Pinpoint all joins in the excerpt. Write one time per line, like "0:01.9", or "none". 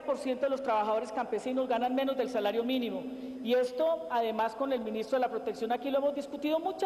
0:02.6